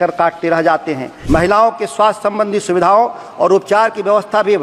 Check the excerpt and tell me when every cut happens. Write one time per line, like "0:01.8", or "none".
0:01.1